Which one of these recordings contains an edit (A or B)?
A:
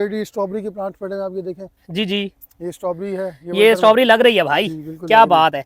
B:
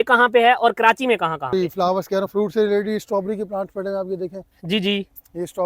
B